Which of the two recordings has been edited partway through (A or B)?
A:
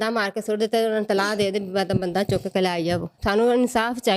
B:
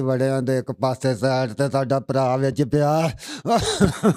A